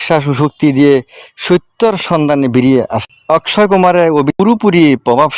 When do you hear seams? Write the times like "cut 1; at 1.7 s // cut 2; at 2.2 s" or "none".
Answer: cut 1; at 3.1 s // cut 2; at 4.3 s